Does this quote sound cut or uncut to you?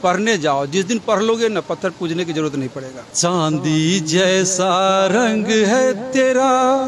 cut